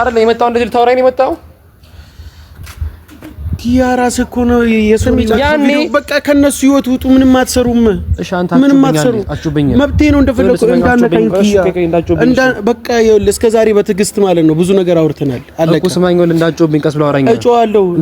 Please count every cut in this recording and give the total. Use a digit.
1